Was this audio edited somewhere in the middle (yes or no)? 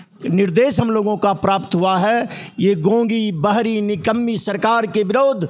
no